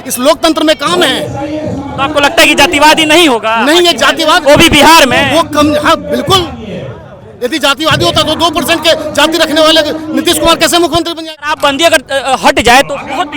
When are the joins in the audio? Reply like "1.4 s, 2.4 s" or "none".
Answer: 11.1 s

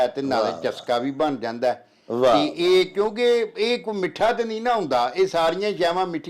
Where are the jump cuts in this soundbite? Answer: none

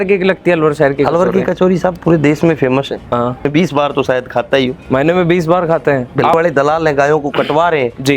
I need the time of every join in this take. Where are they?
3.4 s, 6.3 s

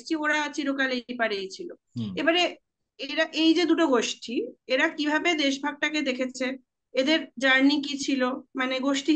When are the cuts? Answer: none

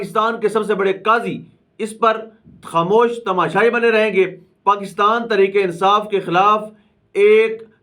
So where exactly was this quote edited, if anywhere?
4.4 s

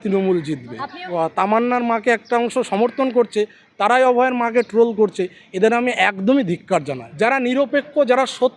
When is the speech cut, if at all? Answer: 0.9 s, 7.0 s

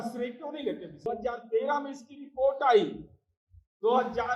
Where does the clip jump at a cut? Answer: 1.1 s

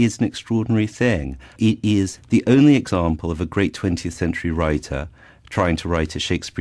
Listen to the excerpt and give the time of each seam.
3.8 s

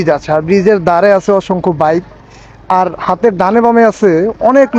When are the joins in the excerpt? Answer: none

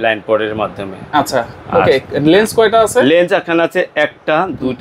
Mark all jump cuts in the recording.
none

